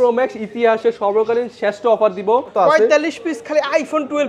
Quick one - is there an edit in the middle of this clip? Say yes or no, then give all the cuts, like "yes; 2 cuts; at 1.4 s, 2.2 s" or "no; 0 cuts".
yes; 1 cut; at 2.5 s